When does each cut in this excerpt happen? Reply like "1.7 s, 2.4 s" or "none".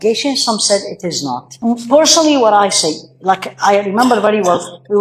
1.5 s